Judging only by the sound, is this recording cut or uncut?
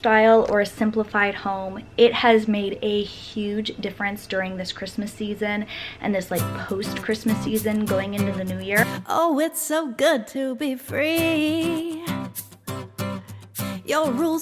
cut